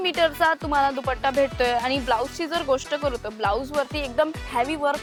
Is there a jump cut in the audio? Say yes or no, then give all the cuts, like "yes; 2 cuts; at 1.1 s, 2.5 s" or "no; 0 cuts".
no; 0 cuts